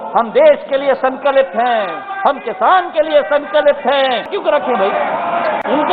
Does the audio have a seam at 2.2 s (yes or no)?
no